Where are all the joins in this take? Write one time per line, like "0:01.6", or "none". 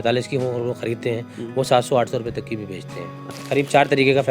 0:03.2